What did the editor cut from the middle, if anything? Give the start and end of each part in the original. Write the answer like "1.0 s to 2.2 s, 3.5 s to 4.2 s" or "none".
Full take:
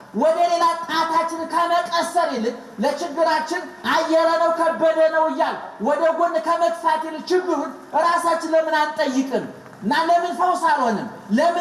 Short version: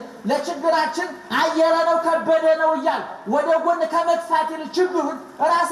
none

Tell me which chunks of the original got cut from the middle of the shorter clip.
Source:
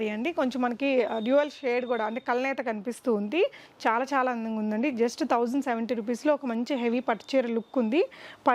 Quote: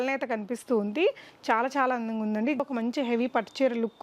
5.0 s to 6.3 s

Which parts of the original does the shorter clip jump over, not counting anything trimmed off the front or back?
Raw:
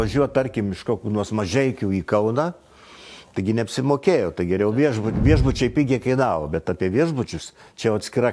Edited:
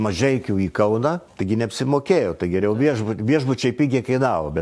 2.6 s to 3.3 s

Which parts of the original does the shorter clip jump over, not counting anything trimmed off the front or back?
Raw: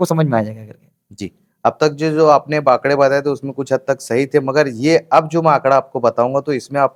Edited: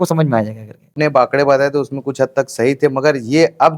0.9 s to 2.5 s

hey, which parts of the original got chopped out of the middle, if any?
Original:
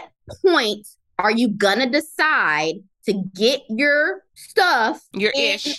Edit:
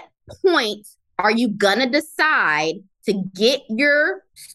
none

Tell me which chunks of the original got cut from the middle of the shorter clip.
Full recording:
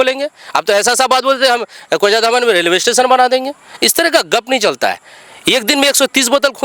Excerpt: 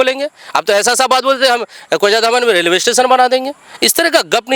none

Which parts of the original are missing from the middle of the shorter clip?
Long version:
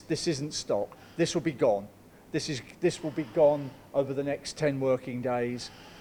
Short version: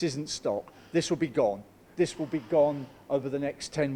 2.0 s to 2.6 s

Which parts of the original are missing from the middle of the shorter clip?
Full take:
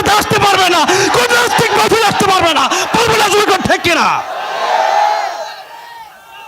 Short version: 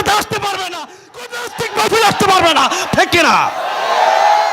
2.9 s to 3.6 s

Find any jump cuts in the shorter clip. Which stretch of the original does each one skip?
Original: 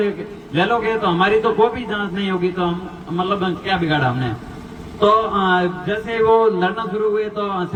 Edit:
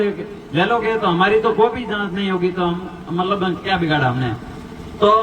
none

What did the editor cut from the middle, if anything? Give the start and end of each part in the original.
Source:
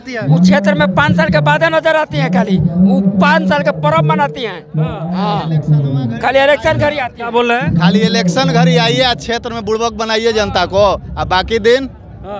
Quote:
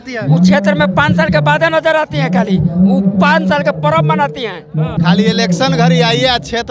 4.9 s to 7.7 s

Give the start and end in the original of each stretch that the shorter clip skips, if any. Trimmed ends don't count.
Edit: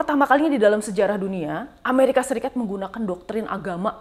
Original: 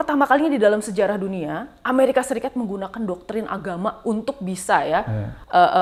none

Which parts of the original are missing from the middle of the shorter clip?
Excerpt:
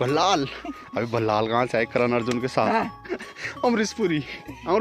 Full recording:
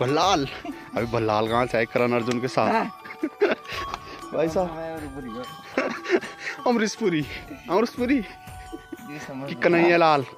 3.2 s to 6.2 s

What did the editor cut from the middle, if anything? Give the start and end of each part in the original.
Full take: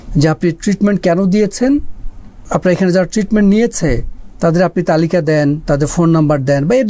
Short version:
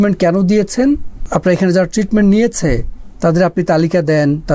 2.0 s to 2.3 s

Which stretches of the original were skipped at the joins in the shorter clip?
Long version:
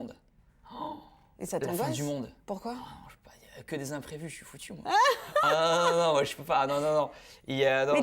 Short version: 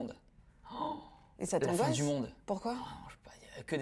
none

